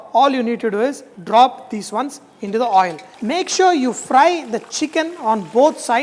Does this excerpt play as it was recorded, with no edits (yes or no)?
no